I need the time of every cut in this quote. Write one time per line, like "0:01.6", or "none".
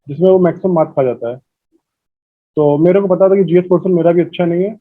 none